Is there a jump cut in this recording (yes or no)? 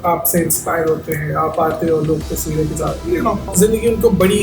yes